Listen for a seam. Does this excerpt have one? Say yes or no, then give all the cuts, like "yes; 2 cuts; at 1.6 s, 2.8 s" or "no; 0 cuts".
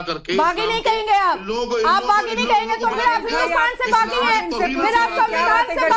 no; 0 cuts